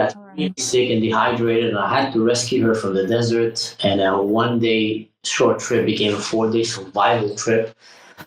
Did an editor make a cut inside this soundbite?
no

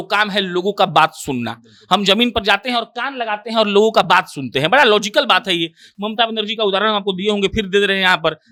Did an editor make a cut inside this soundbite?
no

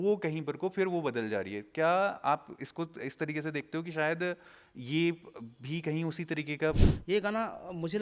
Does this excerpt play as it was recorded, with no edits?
no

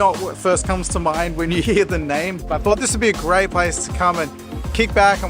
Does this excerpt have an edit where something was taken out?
yes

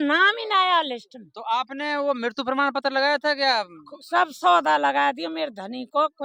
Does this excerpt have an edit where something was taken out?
no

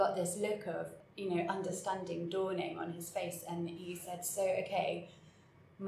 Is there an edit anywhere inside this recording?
no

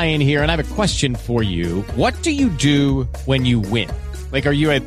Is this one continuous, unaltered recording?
yes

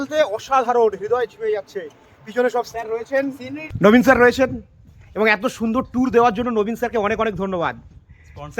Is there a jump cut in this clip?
yes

